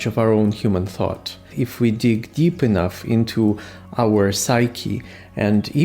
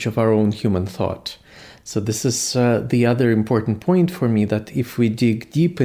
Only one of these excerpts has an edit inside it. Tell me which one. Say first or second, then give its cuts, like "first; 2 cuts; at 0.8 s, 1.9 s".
first; 1 cut; at 1.5 s